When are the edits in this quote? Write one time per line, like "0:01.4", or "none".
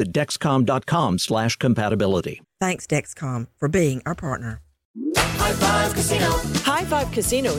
0:04.9